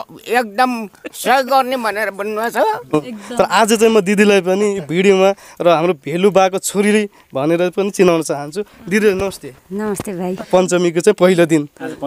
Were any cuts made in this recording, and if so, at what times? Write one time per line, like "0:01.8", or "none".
0:02.9
0:10.4